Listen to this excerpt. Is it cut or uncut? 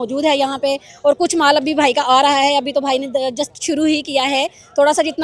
uncut